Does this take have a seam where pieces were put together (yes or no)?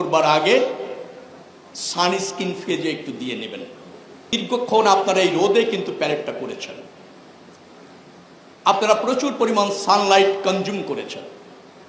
yes